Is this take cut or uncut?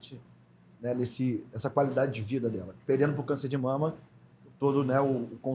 uncut